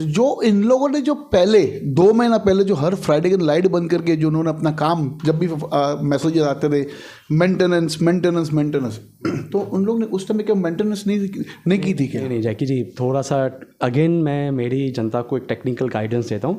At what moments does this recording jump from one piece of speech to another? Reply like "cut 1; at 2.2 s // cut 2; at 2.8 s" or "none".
none